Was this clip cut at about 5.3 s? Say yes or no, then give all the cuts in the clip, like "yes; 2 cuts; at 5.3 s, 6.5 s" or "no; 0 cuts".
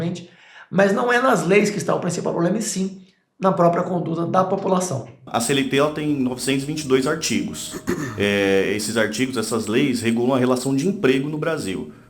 yes; 1 cut; at 5.3 s